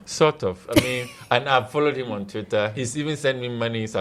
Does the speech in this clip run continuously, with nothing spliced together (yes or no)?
no